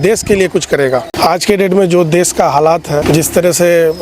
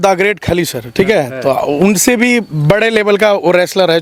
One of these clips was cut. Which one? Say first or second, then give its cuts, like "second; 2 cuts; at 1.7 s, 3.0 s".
first; 2 cuts; at 1.1 s, 3.0 s